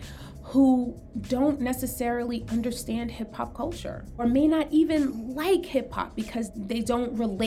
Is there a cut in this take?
yes; 2 cuts; at 4.2 s, 6.5 s

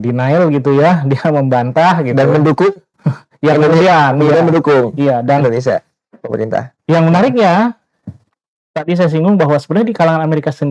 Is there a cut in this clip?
no; 0 cuts

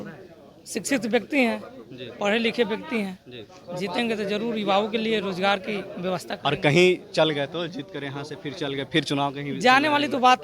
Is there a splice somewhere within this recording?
no; 0 cuts

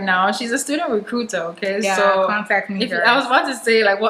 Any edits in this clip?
no; 0 cuts

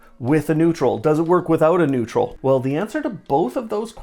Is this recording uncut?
no; 1 cut; at 2.3 s

